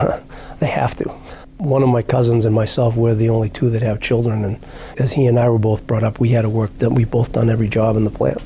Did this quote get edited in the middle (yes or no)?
no